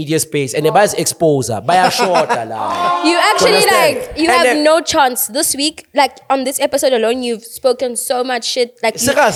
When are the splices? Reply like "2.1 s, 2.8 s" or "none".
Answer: none